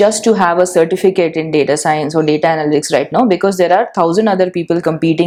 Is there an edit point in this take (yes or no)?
no